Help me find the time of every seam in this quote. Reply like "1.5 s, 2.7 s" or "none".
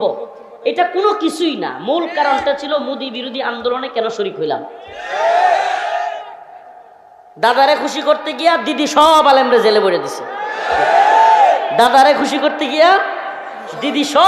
none